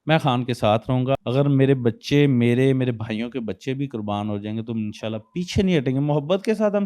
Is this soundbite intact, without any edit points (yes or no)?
no